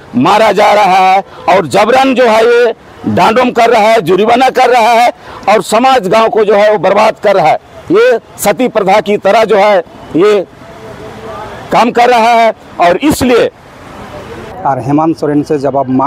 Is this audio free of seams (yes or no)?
no